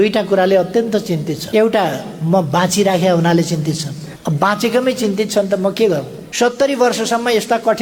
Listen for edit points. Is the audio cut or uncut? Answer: cut